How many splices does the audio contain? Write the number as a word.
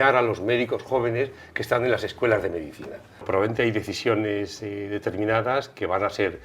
one